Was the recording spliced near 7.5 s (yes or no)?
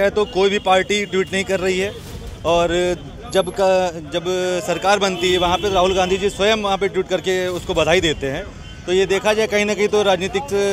no